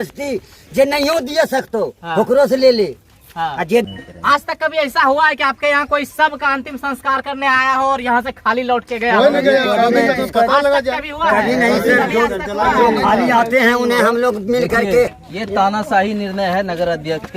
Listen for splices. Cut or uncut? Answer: cut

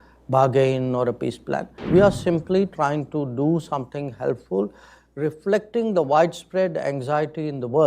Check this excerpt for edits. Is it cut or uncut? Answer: cut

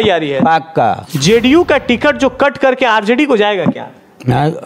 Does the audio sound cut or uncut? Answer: cut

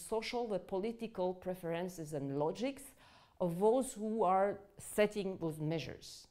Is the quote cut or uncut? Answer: uncut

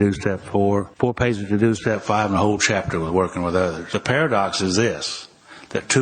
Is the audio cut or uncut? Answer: cut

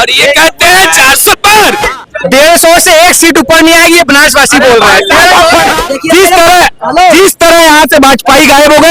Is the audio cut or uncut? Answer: cut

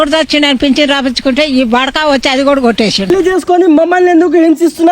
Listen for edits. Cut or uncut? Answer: cut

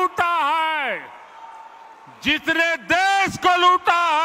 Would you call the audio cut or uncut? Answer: uncut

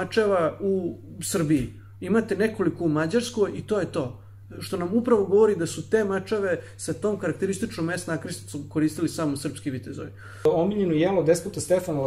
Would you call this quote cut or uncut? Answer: cut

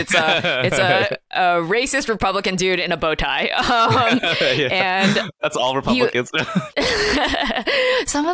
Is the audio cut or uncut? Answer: cut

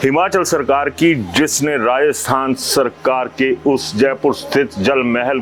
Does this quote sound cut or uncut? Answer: uncut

